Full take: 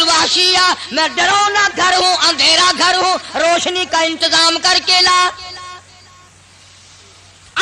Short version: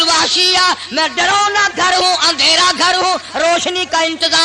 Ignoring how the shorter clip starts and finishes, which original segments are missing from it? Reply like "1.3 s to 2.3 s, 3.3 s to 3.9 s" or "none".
none